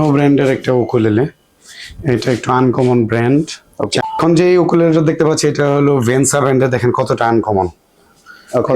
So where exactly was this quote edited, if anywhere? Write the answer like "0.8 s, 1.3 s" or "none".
4.0 s

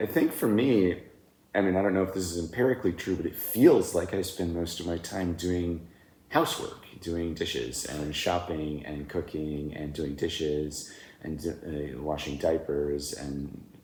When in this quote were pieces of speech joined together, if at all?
none

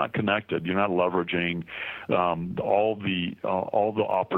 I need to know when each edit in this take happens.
none

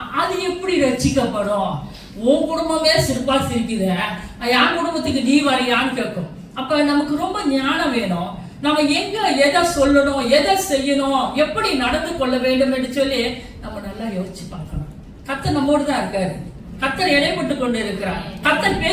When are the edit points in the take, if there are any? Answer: none

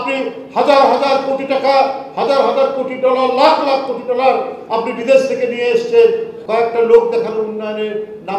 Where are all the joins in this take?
6.4 s

